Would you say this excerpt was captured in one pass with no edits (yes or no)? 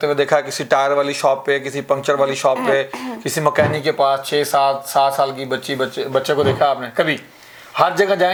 yes